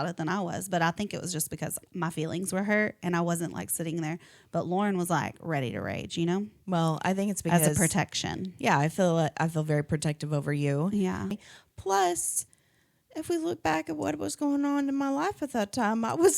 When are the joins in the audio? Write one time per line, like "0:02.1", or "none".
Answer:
0:11.3